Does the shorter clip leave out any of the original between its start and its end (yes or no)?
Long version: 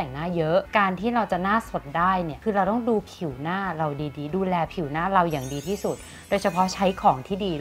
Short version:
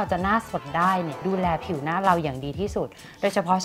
yes